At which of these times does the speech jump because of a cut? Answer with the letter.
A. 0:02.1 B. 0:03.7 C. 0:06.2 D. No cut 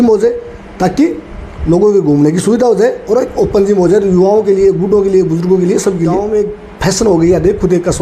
C